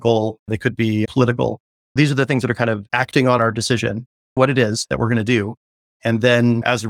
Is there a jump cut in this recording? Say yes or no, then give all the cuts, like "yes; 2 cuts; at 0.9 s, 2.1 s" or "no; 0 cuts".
no; 0 cuts